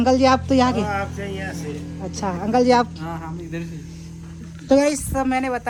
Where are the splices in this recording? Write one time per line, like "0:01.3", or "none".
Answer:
none